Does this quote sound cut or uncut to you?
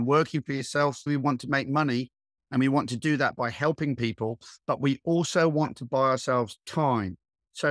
cut